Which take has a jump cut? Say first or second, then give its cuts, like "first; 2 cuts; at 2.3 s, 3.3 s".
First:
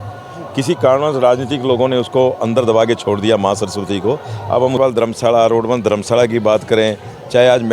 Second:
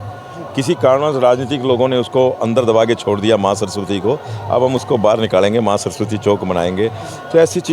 first; 1 cut; at 4.8 s